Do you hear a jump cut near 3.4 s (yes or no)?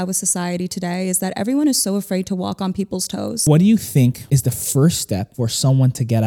yes